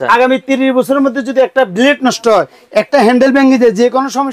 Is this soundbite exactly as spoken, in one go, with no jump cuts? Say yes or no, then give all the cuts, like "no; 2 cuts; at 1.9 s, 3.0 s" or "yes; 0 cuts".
yes; 0 cuts